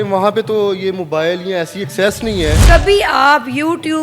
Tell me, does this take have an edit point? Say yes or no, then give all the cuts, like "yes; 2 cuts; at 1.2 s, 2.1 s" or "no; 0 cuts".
yes; 1 cut; at 2.6 s